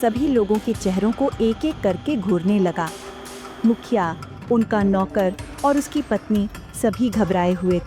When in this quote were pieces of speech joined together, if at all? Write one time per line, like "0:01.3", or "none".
none